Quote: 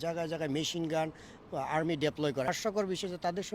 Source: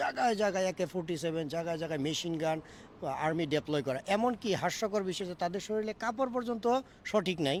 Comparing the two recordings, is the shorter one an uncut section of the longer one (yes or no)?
no